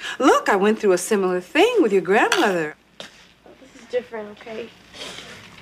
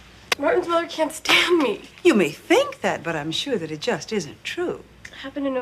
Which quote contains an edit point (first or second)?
second